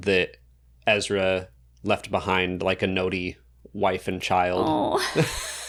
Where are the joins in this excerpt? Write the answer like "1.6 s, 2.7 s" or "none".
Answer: none